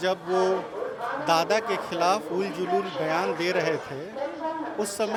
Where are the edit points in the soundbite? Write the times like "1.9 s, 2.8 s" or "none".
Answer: none